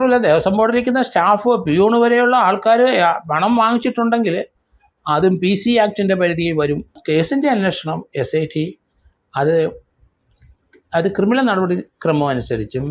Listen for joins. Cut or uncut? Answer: cut